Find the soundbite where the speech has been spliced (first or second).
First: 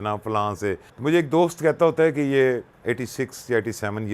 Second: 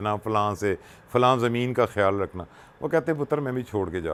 first